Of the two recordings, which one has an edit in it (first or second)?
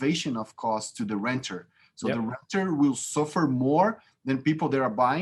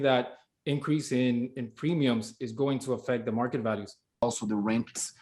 second